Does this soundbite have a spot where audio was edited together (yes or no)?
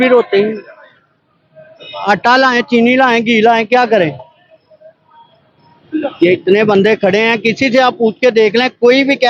no